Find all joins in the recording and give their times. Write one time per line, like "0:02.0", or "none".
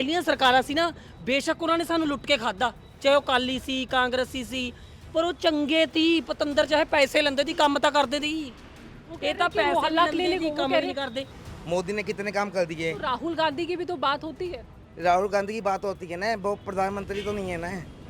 0:11.4